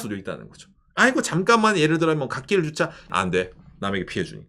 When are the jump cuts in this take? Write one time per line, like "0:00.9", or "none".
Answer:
0:03.1